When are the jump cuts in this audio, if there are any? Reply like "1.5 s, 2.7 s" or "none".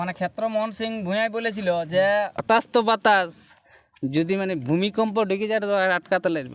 2.4 s